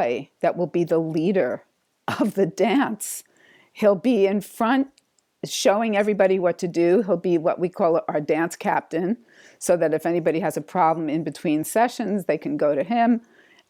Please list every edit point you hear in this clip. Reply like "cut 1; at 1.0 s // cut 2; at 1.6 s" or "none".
none